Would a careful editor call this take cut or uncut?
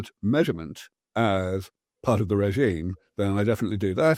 uncut